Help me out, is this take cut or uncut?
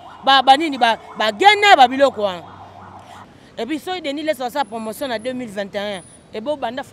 cut